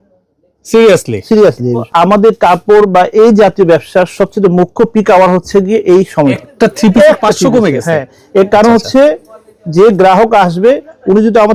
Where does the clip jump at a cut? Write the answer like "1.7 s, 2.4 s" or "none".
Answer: 1.9 s, 6.4 s